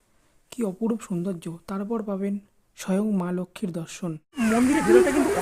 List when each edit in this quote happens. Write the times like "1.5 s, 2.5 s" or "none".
4.2 s